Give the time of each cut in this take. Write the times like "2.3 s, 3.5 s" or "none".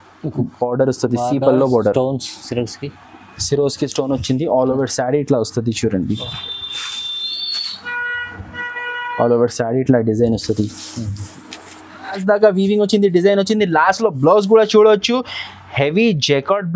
12.2 s